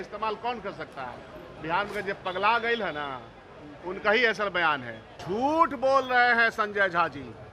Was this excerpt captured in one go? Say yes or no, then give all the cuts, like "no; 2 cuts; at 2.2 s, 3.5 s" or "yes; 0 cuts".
no; 1 cut; at 5.2 s